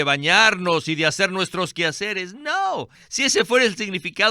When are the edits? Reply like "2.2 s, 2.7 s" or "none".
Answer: 3.0 s